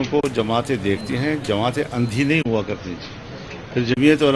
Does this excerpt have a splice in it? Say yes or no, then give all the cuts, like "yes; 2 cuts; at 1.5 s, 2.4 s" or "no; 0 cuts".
no; 0 cuts